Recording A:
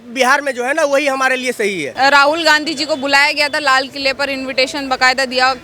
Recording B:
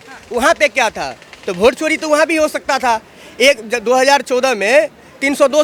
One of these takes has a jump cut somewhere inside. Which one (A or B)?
A